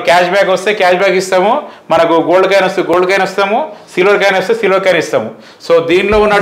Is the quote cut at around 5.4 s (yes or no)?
no